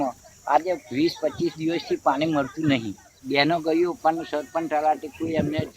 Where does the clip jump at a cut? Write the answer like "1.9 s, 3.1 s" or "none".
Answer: 3.2 s